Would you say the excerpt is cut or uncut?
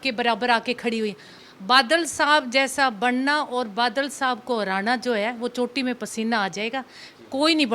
cut